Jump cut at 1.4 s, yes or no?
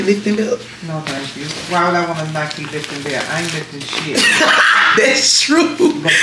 no